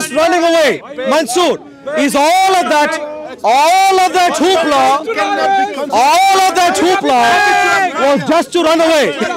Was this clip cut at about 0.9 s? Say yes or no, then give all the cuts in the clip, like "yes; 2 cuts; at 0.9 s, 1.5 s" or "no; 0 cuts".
no; 0 cuts